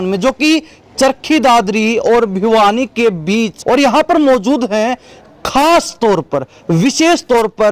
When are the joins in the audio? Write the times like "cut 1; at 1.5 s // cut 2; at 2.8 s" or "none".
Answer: cut 1; at 3.6 s